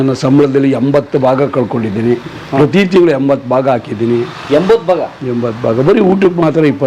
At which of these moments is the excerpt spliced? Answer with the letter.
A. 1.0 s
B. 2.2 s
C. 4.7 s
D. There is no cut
D